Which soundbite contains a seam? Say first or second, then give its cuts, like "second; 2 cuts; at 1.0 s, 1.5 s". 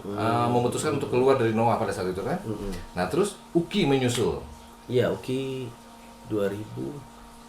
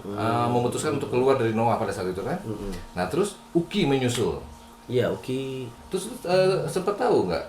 second; 1 cut; at 5.8 s